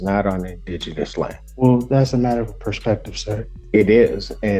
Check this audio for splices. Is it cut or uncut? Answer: cut